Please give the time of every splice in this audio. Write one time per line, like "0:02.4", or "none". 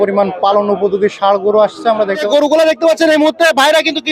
0:02.1